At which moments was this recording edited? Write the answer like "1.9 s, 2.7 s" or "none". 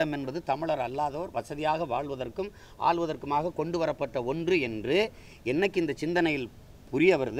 none